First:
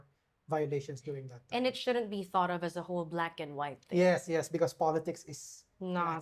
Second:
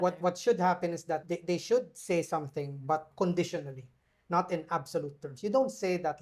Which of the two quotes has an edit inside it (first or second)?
second